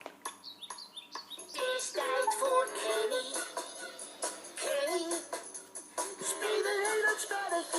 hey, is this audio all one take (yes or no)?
yes